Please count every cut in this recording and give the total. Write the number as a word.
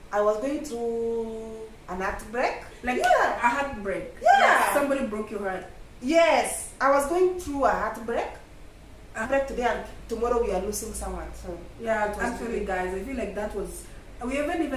two